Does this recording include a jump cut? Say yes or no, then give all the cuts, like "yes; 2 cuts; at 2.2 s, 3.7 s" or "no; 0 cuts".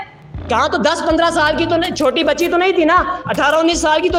no; 0 cuts